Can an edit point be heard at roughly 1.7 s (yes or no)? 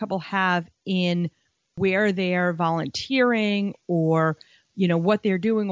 yes